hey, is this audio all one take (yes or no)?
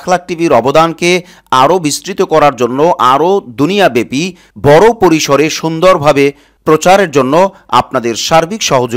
yes